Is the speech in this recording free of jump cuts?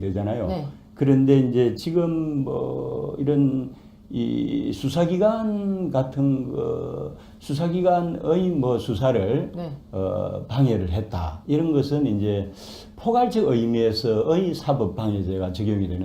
no; 1 cut; at 6.5 s

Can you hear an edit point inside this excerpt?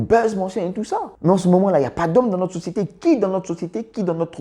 yes; 1 cut; at 1.1 s

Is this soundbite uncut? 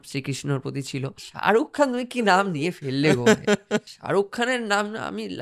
no; 2 cuts; at 1.3 s, 3.9 s

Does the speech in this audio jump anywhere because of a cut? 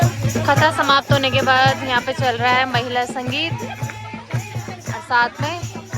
no; 0 cuts

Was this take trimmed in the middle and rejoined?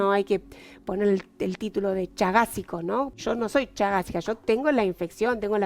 yes; 1 cut; at 3.1 s

